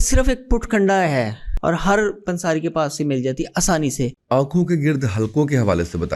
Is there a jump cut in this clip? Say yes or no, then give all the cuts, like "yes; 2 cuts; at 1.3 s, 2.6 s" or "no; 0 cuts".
yes; 2 cuts; at 1.4 s, 4.2 s